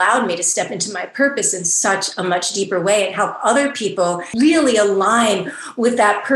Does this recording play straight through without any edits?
no; 1 cut; at 4.3 s

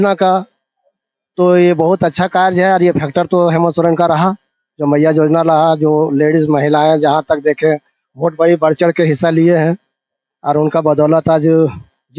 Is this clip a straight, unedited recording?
yes; 0 cuts

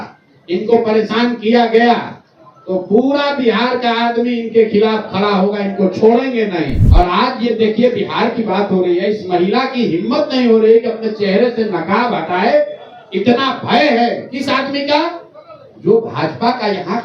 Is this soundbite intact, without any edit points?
no; 1 cut; at 6.8 s

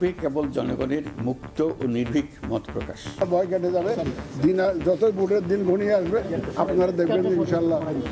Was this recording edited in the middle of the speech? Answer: yes; 1 cut; at 3.2 s

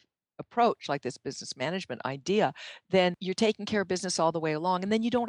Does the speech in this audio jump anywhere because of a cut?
yes; 1 cut; at 3.2 s

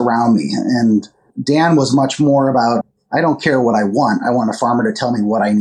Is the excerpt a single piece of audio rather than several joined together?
no; 2 cuts; at 1.3 s, 2.9 s

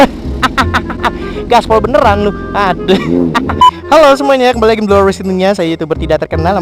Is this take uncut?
no; 1 cut; at 3.7 s

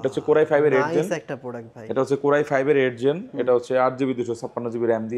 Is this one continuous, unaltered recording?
yes; 0 cuts

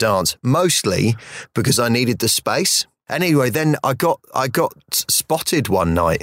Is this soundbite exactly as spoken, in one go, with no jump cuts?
no; 1 cut; at 3.0 s

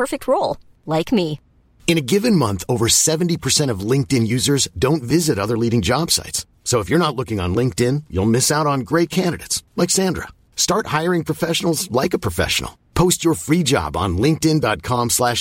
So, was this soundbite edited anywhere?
no; 0 cuts

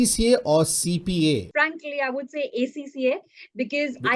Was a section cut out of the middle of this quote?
yes; 1 cut; at 1.5 s

